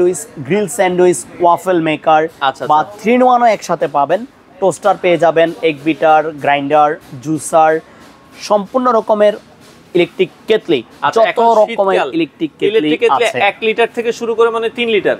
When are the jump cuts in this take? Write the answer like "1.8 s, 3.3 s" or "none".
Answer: none